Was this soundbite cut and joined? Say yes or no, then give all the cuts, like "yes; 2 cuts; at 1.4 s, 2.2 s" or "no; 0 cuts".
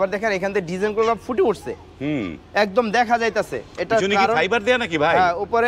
no; 0 cuts